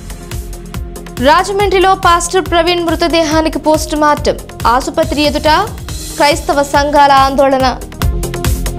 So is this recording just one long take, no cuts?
no; 1 cut; at 1.0 s

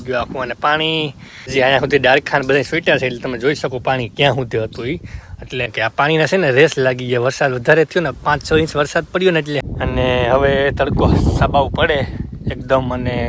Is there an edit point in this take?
yes; 3 cuts; at 1.3 s, 5.6 s, 9.6 s

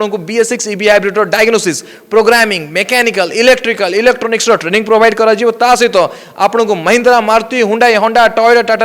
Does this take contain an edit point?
no; 0 cuts

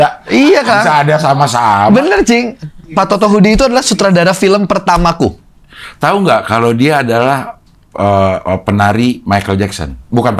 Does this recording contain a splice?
no; 0 cuts

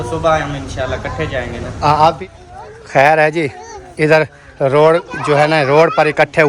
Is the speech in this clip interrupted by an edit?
yes; 1 cut; at 2.2 s

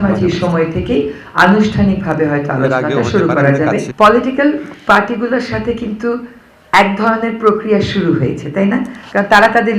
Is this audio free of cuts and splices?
yes; 0 cuts

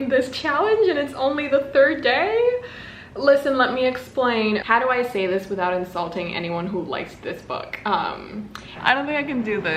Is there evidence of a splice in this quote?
yes; 2 cuts; at 4.6 s, 8.7 s

